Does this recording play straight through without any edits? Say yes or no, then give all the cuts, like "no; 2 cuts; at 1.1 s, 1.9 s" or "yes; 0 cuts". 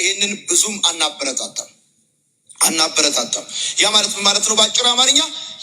yes; 0 cuts